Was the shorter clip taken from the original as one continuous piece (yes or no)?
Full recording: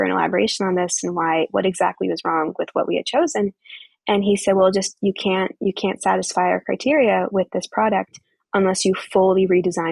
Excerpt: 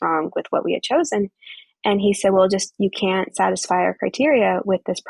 no